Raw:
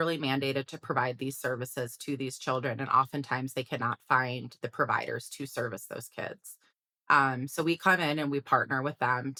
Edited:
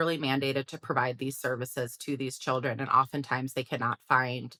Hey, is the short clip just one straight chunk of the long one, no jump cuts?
yes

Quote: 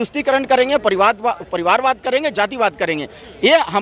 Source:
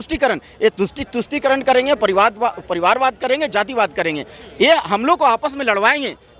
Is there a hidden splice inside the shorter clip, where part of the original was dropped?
no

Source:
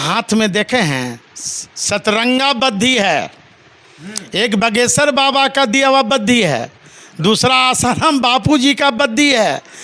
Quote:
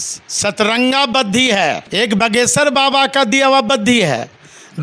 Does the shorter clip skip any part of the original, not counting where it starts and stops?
yes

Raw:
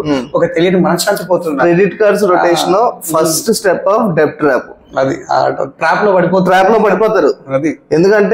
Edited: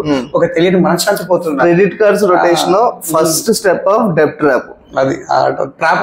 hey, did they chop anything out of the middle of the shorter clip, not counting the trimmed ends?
no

